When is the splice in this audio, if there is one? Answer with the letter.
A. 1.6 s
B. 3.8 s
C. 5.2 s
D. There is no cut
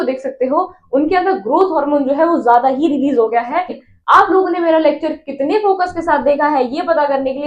B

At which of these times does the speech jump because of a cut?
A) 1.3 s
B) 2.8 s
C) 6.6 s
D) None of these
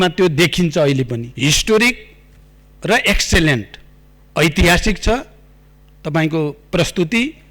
A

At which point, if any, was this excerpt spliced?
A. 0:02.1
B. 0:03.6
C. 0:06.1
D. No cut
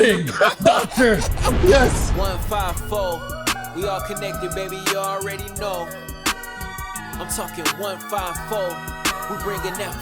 A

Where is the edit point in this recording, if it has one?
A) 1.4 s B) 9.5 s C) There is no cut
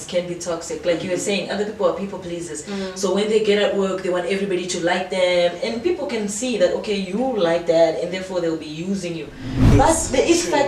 B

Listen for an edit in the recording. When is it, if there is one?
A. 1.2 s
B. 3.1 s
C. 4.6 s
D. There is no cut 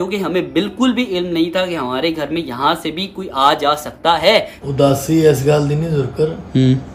C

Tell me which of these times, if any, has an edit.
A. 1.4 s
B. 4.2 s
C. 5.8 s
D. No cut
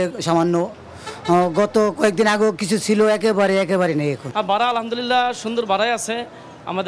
B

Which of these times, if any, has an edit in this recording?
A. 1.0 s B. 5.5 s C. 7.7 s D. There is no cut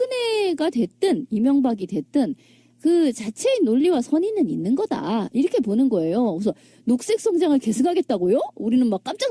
B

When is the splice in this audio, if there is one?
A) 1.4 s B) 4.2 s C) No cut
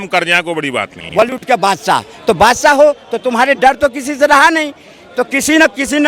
A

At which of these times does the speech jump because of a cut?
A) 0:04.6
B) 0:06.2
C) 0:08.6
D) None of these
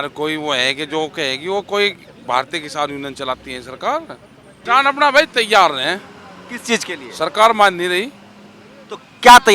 A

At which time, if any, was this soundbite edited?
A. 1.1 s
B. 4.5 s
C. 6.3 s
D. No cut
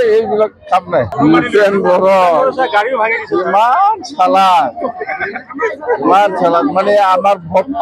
A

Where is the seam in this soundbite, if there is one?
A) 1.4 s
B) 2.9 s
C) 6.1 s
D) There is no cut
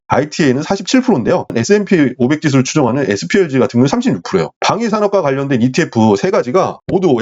D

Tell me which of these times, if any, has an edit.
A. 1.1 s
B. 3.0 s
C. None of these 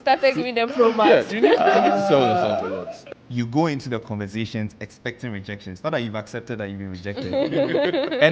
B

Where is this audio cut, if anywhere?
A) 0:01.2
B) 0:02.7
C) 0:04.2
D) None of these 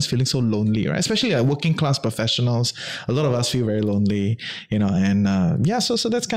D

